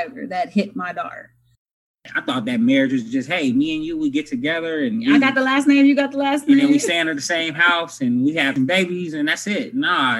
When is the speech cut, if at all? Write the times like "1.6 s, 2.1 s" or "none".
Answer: 1.7 s, 8.5 s